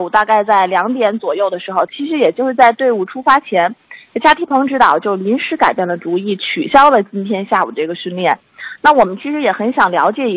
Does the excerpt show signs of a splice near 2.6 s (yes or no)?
no